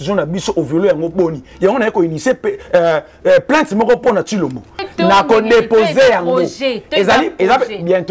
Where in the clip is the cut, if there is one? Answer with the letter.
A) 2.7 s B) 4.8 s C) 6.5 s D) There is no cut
B